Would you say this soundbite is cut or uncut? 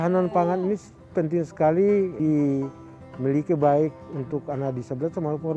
cut